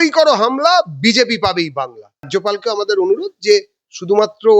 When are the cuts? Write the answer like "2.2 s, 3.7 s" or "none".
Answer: 2.3 s